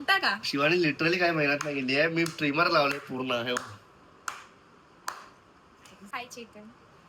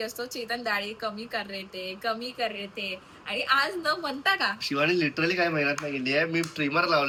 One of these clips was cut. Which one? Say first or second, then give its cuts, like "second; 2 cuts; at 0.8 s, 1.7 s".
first; 1 cut; at 6.0 s